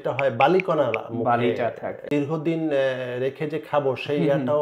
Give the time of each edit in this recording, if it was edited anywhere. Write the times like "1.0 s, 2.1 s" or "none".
2.1 s